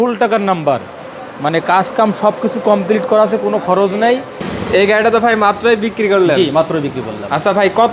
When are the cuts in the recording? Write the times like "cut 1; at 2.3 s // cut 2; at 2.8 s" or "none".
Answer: cut 1; at 4.4 s